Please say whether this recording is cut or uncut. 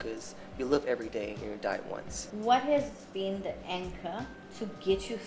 cut